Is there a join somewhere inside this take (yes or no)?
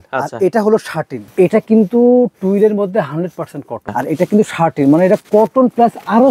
yes